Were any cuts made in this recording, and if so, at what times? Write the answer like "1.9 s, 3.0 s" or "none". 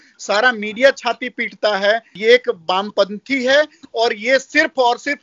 2.1 s